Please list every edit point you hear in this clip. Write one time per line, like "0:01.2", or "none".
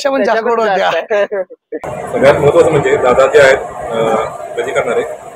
0:01.8

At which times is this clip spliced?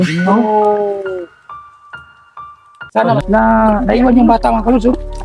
0:03.2

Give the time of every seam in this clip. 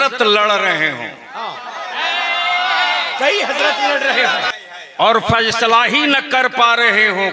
0:04.5

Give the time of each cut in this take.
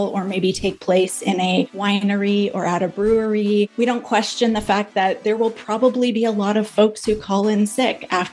0:01.7
0:03.7

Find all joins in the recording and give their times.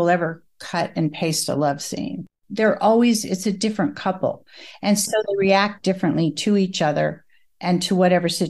0:02.3

